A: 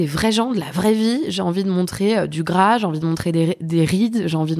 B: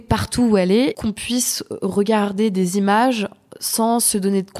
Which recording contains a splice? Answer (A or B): B